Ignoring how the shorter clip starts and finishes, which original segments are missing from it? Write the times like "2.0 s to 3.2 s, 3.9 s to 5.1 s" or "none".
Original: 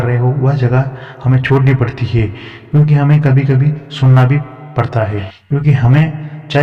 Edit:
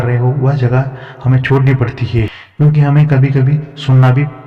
2.4 s to 2.5 s